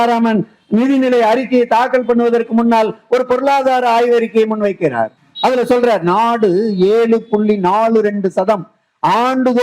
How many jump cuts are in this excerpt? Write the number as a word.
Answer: one